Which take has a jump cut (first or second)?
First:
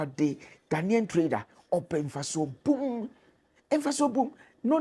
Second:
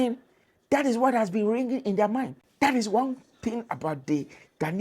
second